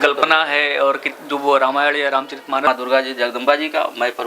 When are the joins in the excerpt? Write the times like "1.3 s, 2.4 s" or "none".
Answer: 2.7 s

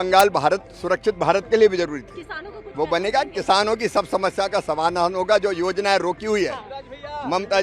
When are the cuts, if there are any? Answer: none

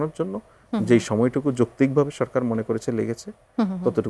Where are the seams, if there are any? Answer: none

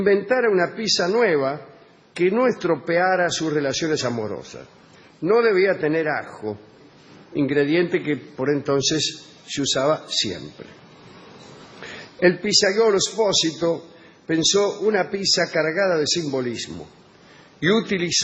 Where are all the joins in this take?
5.6 s

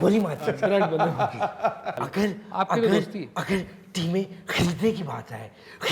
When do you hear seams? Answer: 1.9 s

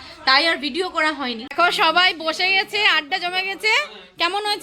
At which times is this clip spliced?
1.4 s

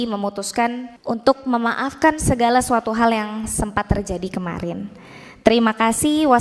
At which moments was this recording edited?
0.9 s

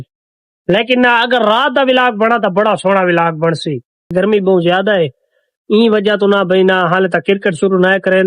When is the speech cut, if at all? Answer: 4.1 s

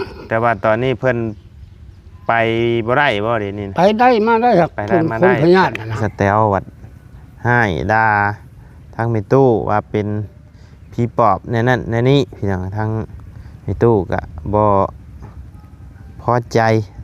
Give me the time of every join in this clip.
5.9 s

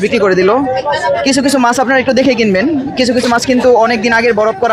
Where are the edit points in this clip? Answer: none

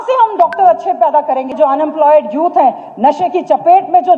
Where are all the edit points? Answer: 1.6 s

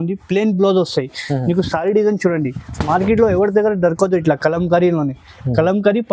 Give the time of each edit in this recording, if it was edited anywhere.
none

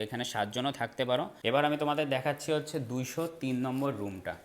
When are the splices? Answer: 1.4 s

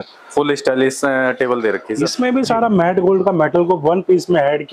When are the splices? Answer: 2.0 s

